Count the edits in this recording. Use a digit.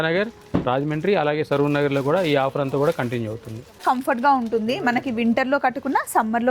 1